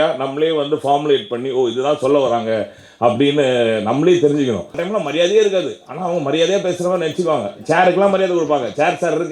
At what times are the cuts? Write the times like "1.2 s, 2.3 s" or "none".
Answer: 4.8 s